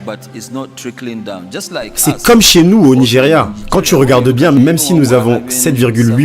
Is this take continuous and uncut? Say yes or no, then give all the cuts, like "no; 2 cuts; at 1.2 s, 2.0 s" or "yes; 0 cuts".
no; 1 cut; at 2.0 s